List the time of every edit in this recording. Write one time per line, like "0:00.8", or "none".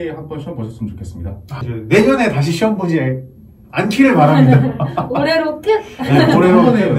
0:01.6